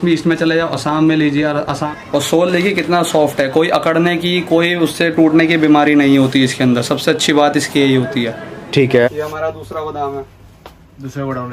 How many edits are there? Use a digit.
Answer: 2